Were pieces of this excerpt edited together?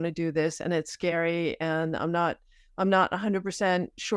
no; 0 cuts

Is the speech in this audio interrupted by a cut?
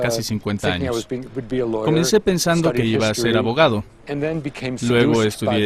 no; 0 cuts

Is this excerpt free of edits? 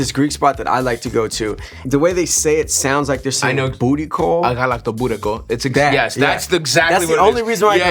yes; 0 cuts

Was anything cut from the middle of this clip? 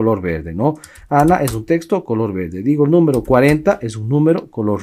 no; 0 cuts

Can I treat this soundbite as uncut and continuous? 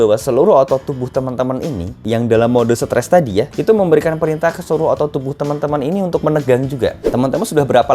no; 2 cuts; at 2.0 s, 7.1 s

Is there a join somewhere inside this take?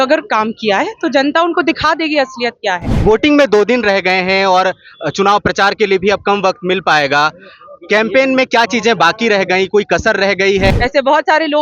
yes; 2 cuts; at 2.9 s, 10.7 s

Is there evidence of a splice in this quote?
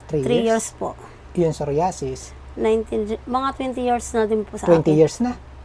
no; 0 cuts

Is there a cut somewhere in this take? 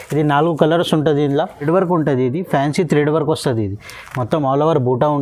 yes; 1 cut; at 1.7 s

